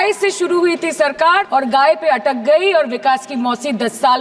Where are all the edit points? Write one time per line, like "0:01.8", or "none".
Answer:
none